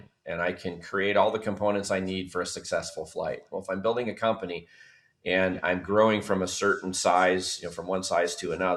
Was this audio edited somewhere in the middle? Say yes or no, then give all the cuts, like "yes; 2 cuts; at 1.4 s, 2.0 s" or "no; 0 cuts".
no; 0 cuts